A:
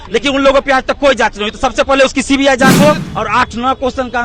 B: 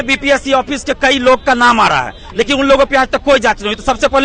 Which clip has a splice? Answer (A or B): A